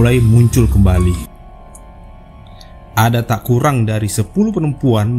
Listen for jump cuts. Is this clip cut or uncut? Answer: cut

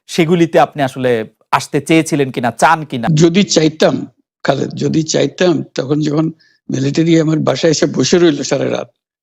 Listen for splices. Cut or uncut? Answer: cut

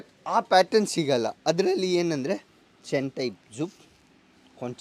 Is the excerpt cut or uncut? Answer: uncut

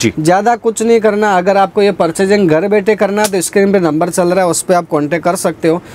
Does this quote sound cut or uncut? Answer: uncut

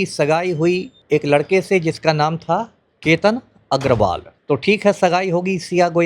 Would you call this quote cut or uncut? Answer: cut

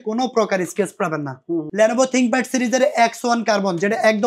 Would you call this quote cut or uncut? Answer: cut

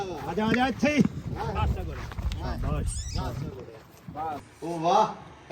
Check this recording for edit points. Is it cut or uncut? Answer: cut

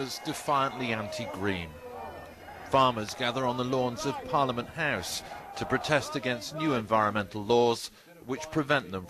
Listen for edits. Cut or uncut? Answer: cut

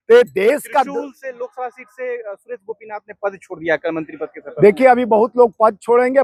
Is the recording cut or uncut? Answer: uncut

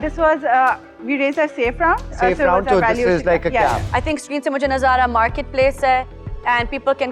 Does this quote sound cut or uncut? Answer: cut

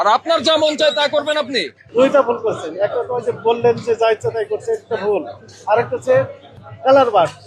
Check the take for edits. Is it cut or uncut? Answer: cut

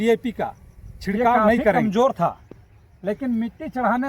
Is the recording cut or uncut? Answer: cut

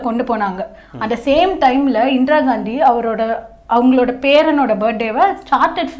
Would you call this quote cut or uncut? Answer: uncut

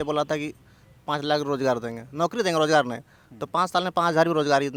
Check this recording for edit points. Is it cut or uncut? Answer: uncut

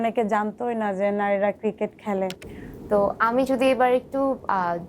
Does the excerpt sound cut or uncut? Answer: cut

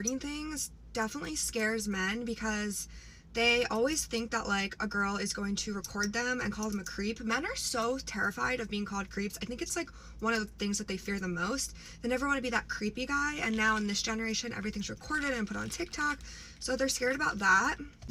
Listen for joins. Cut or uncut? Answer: uncut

